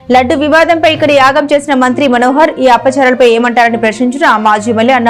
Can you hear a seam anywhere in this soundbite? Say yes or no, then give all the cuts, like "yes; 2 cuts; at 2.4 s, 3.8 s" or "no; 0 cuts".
no; 0 cuts